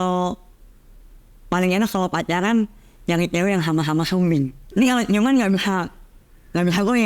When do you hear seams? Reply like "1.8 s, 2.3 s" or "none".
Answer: 4.6 s